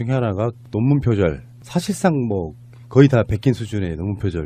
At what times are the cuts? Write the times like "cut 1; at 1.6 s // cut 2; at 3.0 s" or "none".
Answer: none